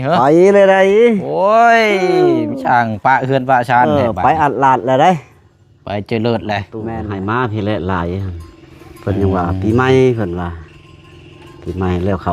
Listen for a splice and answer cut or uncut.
cut